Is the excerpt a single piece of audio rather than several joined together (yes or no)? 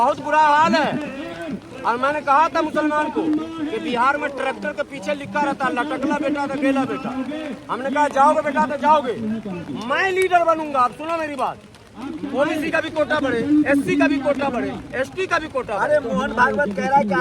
no